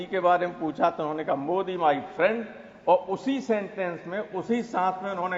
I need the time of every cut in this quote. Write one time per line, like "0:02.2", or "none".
none